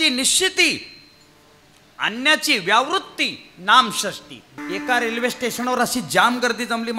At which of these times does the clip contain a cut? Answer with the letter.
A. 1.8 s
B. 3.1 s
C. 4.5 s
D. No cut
C